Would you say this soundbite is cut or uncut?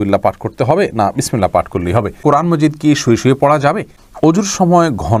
cut